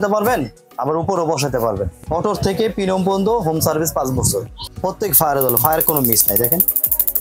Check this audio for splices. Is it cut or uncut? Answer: cut